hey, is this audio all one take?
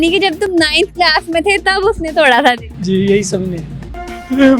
no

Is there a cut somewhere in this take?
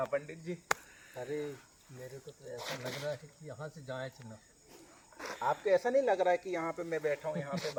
no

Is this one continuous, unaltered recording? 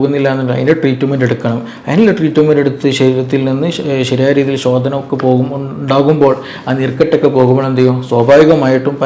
yes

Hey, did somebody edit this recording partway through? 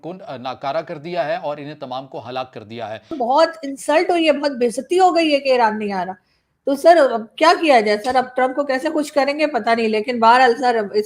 yes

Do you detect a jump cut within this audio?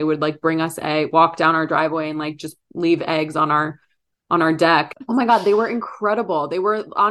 yes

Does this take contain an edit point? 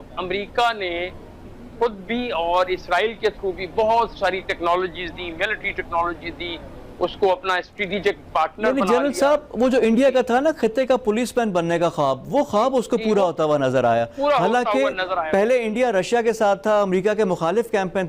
no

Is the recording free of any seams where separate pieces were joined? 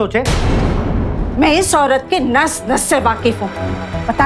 no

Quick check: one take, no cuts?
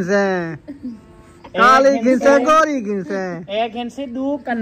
yes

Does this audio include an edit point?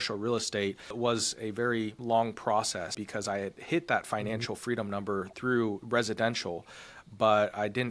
yes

